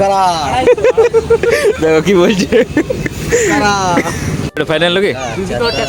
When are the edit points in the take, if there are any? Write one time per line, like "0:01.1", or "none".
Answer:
none